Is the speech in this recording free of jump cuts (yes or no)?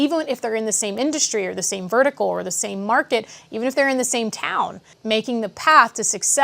no